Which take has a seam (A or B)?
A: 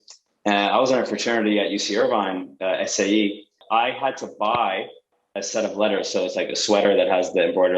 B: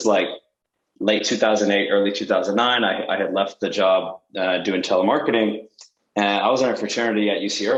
A